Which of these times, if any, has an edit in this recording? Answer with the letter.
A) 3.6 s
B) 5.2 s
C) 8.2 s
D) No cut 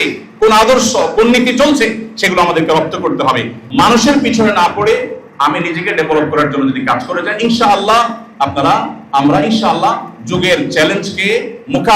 A